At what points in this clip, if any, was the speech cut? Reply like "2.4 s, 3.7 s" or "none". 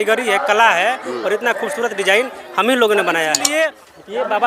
3.5 s